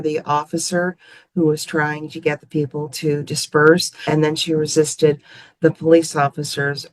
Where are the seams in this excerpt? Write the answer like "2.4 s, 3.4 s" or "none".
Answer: 4.0 s